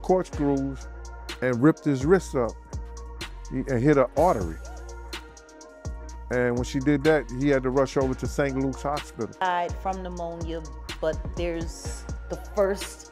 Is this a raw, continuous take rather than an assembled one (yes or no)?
no